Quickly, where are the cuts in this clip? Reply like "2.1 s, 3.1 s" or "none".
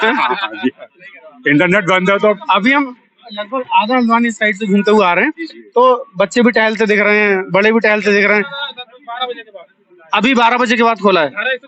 none